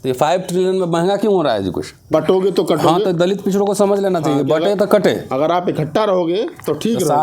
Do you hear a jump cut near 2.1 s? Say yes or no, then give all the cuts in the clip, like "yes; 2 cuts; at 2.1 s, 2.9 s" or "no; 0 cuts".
yes; 1 cut; at 2.1 s